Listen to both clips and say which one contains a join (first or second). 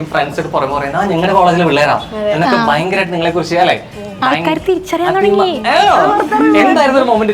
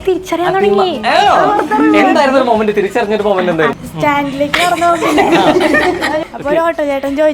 second